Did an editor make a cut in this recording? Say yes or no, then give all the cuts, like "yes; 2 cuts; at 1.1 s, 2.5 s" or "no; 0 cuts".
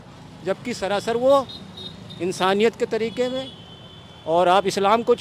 no; 0 cuts